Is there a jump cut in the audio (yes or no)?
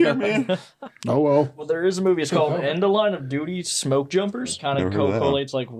yes